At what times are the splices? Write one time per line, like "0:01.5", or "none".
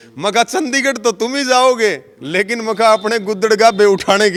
none